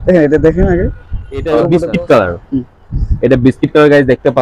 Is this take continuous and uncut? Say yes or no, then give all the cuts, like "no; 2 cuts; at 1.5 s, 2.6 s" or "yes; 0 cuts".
no; 1 cut; at 1.8 s